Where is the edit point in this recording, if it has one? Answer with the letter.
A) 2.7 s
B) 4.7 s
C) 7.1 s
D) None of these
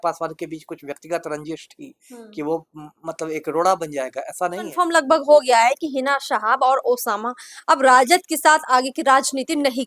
B